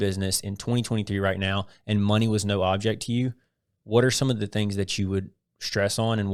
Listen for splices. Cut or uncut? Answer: uncut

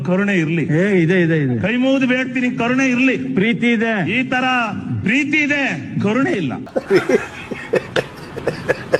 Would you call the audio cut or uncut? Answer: uncut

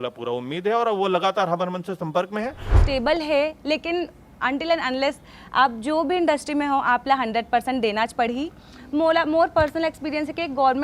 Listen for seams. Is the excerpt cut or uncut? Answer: cut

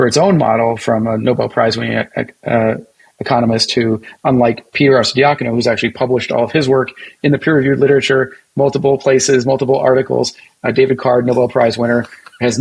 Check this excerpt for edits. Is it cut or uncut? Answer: uncut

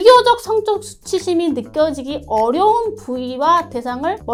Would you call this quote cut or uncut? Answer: uncut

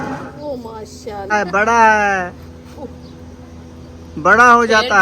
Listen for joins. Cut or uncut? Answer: cut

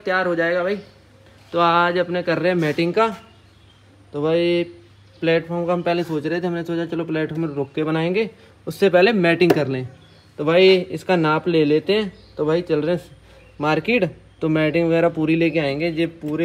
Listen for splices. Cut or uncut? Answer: uncut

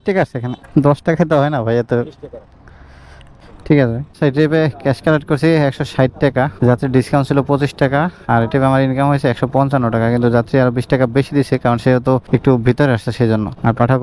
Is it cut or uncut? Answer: uncut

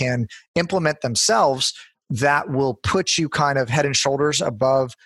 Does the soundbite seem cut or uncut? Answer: uncut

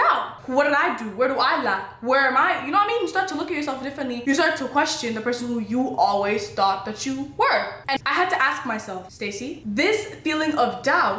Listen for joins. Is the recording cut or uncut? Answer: cut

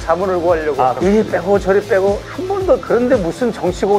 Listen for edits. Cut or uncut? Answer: cut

